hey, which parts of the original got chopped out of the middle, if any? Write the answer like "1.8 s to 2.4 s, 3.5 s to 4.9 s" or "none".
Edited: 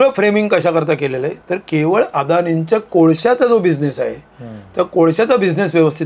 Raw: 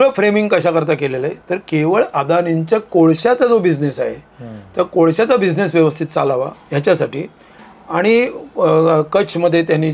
none